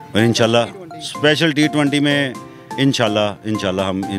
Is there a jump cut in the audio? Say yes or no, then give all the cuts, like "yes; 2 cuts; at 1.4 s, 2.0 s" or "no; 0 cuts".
no; 0 cuts